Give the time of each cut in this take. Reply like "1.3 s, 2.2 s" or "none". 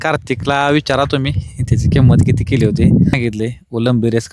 3.1 s